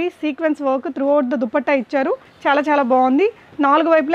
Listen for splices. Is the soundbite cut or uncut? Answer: cut